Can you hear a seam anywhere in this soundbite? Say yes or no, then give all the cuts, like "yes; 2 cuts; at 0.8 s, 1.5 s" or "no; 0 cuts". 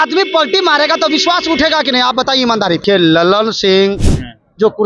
yes; 1 cut; at 2.8 s